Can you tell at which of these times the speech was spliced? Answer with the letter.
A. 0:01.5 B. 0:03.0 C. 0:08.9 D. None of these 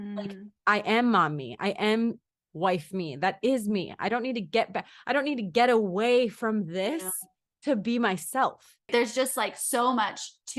C